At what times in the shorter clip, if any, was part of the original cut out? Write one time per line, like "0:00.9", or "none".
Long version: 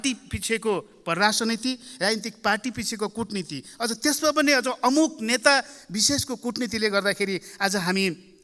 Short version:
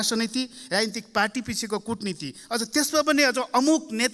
none